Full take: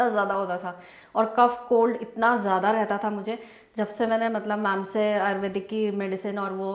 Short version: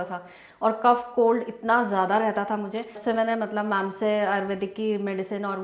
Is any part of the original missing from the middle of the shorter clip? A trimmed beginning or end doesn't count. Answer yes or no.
yes